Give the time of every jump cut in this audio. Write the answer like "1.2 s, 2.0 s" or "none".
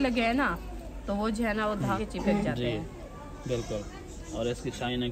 2.0 s